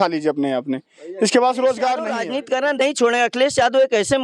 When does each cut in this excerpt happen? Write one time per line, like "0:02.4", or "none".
0:02.2